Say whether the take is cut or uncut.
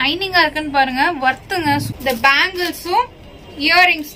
cut